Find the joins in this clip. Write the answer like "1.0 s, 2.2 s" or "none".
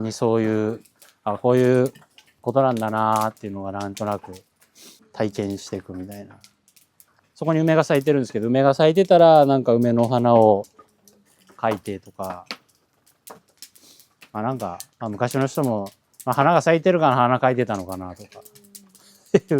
5.0 s, 7.1 s

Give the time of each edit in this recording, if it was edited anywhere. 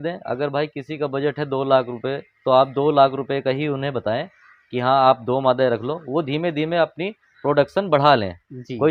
none

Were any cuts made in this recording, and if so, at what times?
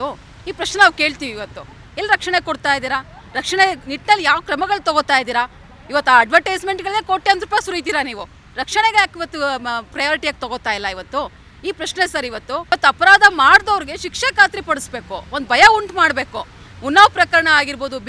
12.7 s

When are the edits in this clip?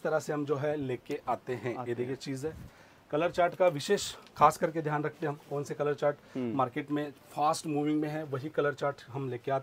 none

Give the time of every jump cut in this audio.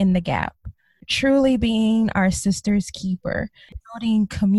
1.0 s, 3.7 s

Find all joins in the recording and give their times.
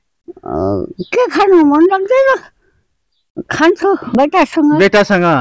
4.1 s

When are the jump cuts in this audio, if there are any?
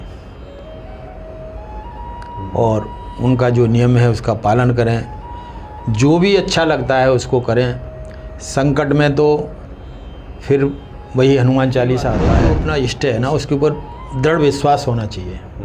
12.5 s

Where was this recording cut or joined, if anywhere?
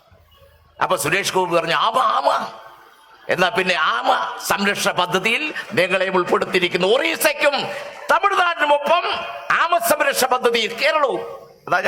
none

